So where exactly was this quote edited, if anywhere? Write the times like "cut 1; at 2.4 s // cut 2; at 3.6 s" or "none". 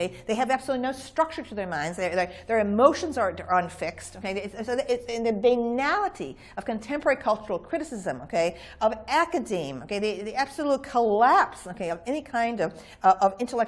cut 1; at 4.2 s